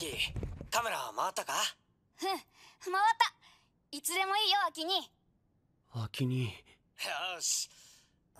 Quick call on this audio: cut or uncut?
uncut